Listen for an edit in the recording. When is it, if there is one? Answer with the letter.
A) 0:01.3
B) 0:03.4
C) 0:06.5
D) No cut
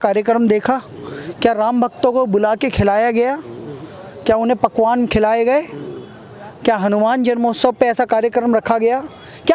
D